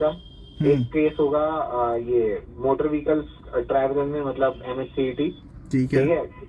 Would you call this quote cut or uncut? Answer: uncut